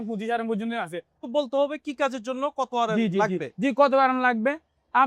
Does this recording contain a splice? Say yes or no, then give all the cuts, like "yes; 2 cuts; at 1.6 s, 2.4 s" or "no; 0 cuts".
yes; 1 cut; at 1.2 s